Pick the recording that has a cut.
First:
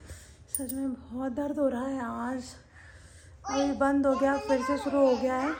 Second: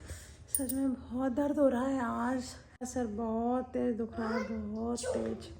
second; 1 cut; at 2.9 s

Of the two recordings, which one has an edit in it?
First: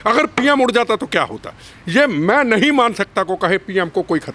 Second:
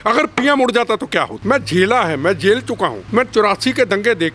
second; 2 cuts; at 1.3 s, 3.0 s

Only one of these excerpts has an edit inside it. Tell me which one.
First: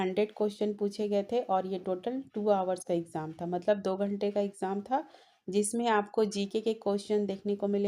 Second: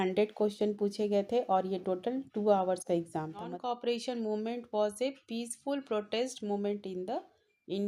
second; 1 cut; at 3.5 s

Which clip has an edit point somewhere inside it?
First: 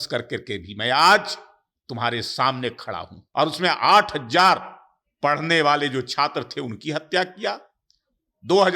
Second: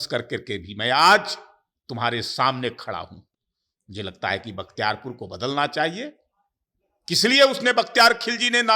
first; 1 cut; at 3.2 s

